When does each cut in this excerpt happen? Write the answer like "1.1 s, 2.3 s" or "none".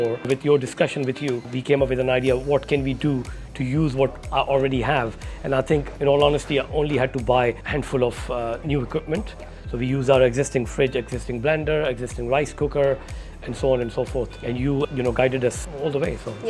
none